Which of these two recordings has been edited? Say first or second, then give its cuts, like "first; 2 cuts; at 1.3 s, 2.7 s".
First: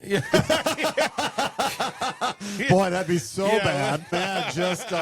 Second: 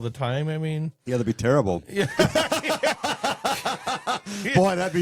first; 1 cut; at 4.1 s